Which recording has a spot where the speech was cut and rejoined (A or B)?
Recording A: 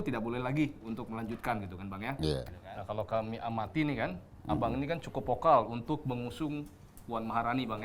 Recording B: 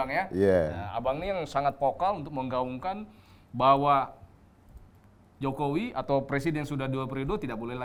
A